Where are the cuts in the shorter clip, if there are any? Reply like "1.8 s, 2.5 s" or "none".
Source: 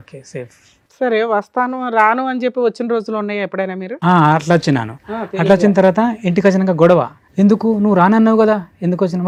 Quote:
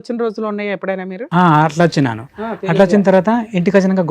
none